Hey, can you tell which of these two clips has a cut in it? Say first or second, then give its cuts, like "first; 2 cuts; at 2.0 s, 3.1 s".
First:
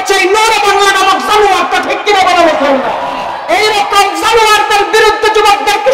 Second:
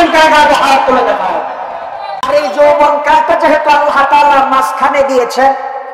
second; 1 cut; at 2.2 s